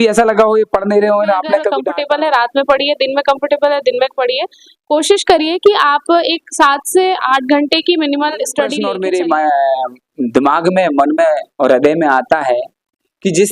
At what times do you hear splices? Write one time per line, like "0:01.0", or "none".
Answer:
0:01.8
0:08.8